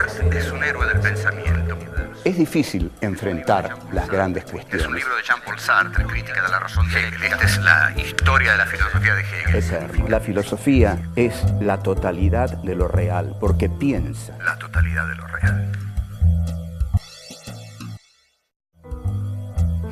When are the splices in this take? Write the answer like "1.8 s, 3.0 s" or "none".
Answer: none